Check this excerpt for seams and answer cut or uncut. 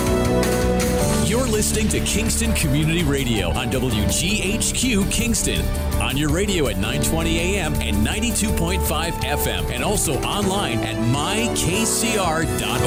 uncut